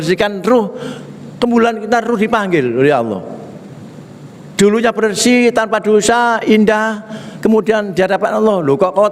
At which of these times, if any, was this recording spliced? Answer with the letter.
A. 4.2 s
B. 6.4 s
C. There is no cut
C